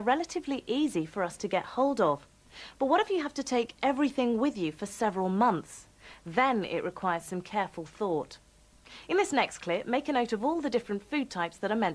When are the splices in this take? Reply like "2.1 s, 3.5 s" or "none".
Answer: 5.3 s